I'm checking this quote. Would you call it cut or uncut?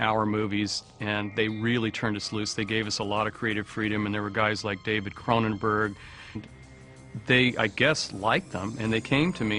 uncut